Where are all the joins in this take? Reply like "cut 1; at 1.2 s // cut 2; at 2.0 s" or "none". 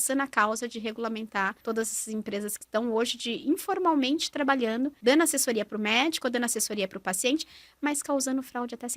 cut 1; at 1.6 s // cut 2; at 5.0 s

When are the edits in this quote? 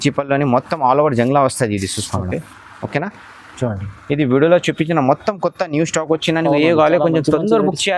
none

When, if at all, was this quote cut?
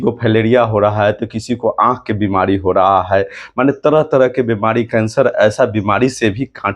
none

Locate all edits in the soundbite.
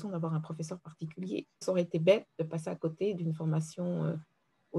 cut 1; at 1.6 s

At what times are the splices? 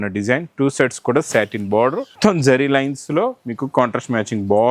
cut 1; at 2.1 s

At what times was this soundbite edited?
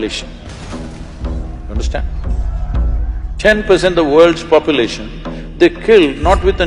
none

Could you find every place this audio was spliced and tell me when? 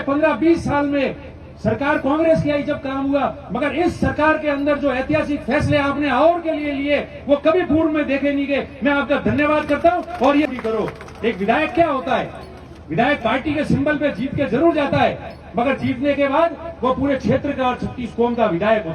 cut 1; at 10.4 s

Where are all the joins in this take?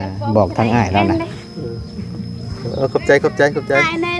cut 1; at 1.1 s

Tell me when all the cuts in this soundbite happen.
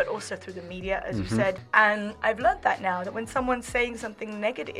cut 1; at 1.6 s

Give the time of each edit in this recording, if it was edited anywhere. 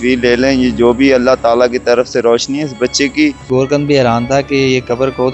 cut 1; at 3.4 s

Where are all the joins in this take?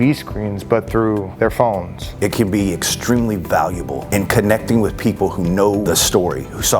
cut 1; at 2.1 s

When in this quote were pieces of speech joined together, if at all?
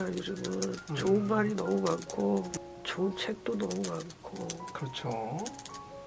cut 1; at 2.5 s

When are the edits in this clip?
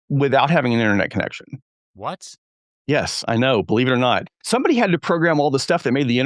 cut 1; at 1.8 s

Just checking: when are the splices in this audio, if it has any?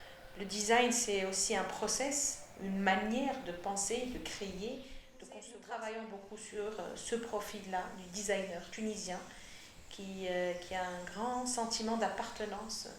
cut 1; at 5.3 s

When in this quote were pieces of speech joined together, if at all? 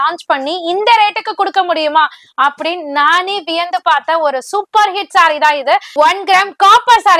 cut 1; at 5.9 s

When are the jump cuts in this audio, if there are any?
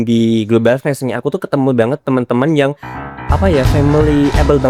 none

